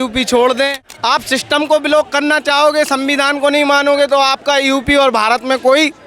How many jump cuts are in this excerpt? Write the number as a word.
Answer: one